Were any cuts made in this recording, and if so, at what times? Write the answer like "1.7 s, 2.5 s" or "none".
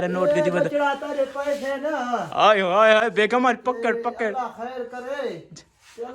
none